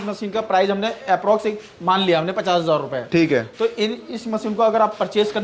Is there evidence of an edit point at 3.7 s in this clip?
no; 0 cuts

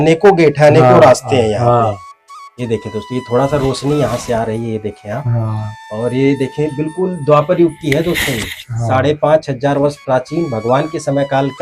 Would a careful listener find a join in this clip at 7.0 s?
no; 0 cuts

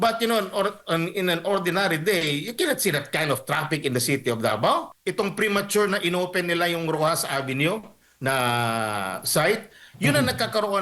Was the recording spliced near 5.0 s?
yes; 1 cut; at 5.0 s

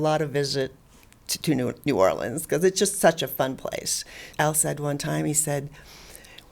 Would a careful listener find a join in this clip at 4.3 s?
yes; 1 cut; at 4.3 s

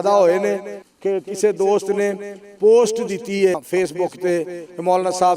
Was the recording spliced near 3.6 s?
yes; 1 cut; at 3.6 s

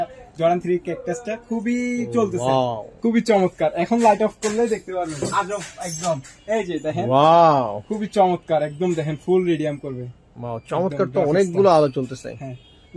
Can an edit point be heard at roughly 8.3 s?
no; 1 cut; at 2.9 s

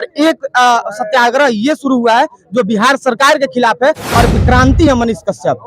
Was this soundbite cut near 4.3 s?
yes; 1 cut; at 4.3 s

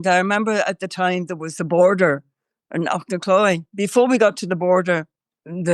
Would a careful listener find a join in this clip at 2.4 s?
no; 1 cut; at 3.7 s

